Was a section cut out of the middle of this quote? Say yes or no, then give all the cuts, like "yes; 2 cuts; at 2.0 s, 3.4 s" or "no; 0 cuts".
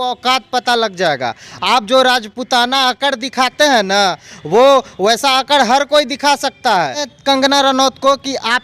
yes; 1 cut; at 7.1 s